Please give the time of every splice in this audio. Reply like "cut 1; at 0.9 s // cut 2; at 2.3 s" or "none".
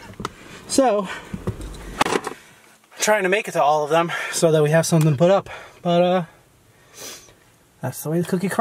none